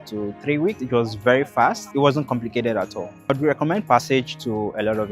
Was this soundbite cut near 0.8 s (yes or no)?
yes